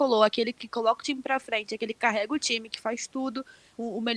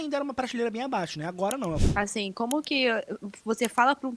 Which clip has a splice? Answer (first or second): second